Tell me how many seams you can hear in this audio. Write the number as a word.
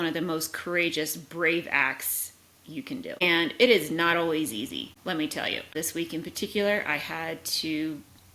three